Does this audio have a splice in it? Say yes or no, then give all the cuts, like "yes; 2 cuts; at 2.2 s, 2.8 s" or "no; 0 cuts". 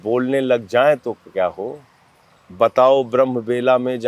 no; 0 cuts